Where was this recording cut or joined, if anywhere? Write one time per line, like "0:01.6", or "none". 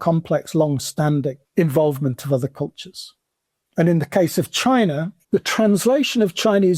0:01.4
0:05.1